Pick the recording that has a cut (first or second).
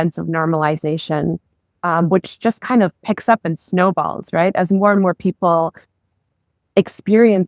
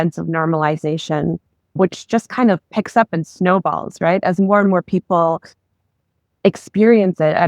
second